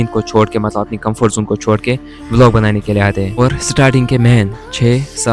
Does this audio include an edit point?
yes; 1 cut; at 3.3 s

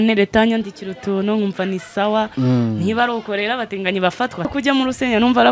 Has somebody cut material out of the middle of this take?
yes; 1 cut; at 4.5 s

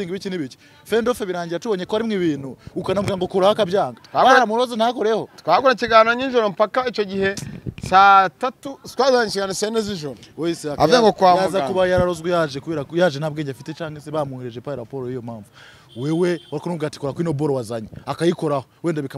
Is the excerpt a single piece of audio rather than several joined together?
yes; 0 cuts

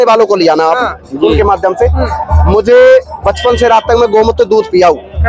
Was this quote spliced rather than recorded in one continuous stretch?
no; 0 cuts

